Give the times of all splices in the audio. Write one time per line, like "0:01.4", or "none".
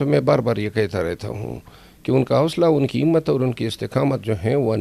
none